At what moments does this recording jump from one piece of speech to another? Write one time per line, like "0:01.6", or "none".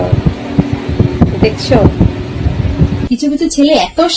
0:03.1